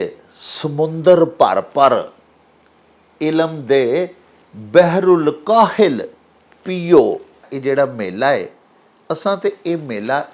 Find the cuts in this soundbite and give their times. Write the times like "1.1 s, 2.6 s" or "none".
7.5 s